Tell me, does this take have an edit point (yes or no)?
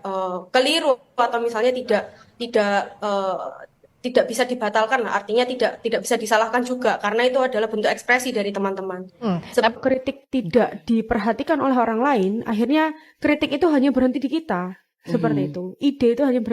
no